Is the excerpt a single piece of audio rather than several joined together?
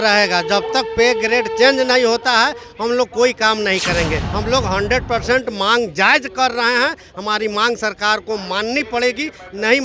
no; 1 cut; at 4.3 s

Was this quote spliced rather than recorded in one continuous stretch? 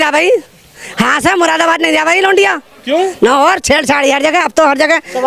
no; 0 cuts

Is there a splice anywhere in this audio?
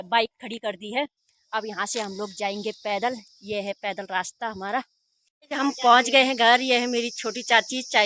yes; 1 cut; at 5.3 s

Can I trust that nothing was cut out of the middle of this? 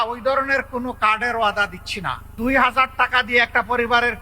no; 1 cut; at 2.2 s

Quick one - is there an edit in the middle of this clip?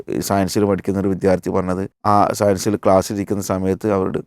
yes; 1 cut; at 1.9 s

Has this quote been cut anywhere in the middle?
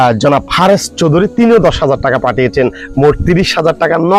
no; 0 cuts

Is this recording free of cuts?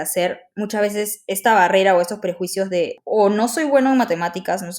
no; 1 cut; at 3.0 s

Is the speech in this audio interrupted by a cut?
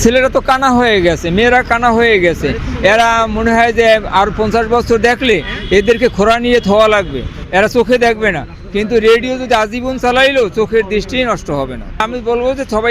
no; 0 cuts

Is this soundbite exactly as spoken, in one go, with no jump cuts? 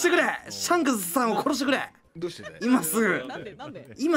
yes; 0 cuts

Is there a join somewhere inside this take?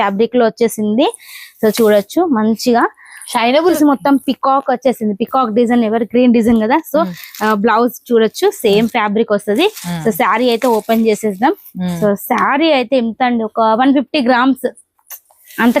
yes; 1 cut; at 3.8 s

